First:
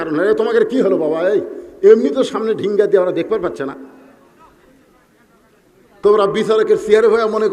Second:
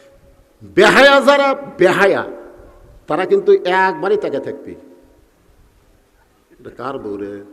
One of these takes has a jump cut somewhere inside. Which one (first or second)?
first